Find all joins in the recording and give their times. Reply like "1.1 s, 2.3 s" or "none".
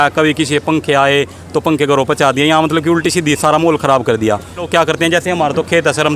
4.7 s